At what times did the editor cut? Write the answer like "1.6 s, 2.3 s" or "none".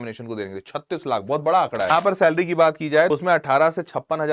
1.9 s, 3.1 s